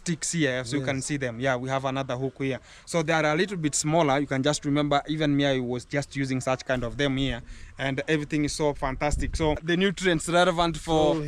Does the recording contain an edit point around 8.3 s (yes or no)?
no